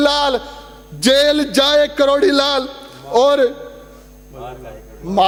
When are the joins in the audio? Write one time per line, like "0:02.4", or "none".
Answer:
none